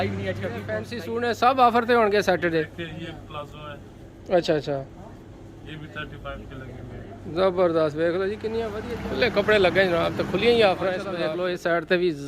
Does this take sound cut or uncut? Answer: cut